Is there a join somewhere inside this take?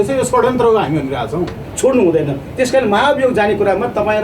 yes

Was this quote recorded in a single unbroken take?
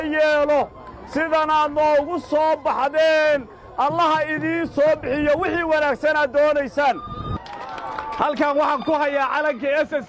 no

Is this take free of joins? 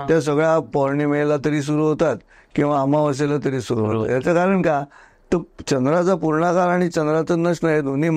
yes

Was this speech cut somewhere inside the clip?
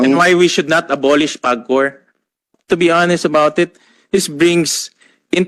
yes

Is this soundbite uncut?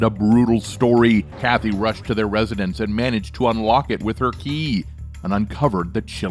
no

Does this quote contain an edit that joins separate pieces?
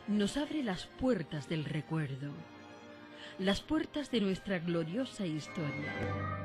yes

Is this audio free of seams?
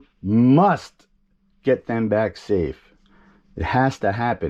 yes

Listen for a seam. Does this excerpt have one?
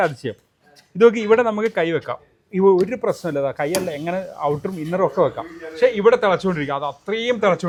no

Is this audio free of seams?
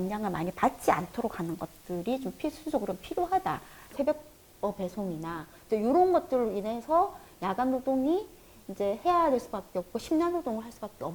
no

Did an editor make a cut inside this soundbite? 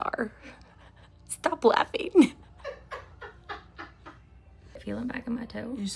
yes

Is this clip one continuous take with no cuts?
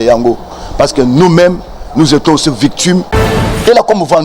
no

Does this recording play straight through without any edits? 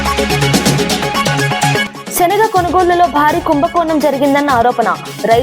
no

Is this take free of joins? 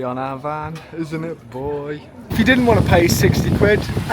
no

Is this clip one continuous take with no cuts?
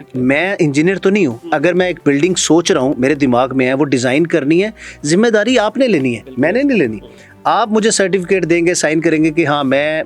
yes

